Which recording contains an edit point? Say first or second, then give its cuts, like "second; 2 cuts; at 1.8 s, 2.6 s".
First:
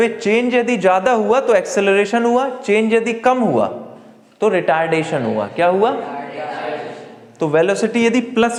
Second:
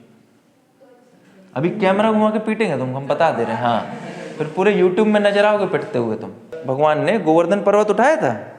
second; 1 cut; at 6.6 s